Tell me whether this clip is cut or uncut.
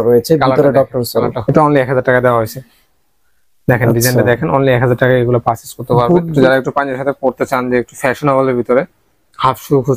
cut